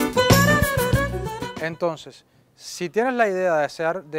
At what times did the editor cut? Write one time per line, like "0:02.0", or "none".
0:01.3